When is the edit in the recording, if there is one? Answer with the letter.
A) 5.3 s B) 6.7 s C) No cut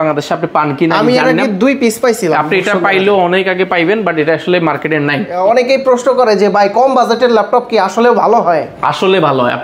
A